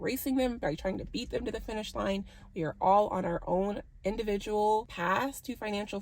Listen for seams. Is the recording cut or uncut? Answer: cut